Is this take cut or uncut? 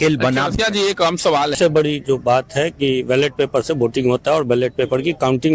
cut